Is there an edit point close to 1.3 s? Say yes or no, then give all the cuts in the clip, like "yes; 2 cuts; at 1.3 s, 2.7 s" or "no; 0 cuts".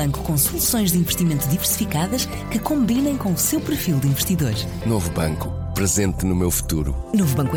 no; 0 cuts